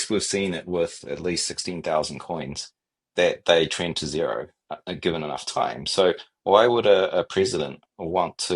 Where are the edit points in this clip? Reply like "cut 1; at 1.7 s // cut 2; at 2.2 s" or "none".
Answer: none